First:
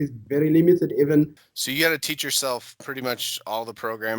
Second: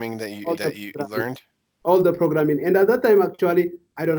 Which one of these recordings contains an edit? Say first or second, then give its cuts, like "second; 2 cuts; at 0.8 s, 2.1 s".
first; 1 cut; at 1.4 s